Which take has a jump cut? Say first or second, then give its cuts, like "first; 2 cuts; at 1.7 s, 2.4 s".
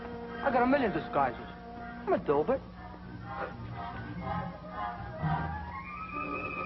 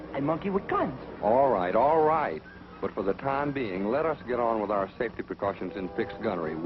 first; 1 cut; at 3.2 s